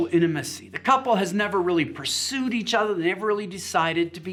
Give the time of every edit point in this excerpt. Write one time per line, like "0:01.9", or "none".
none